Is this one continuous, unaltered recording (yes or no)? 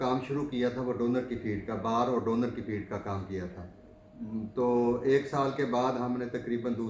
yes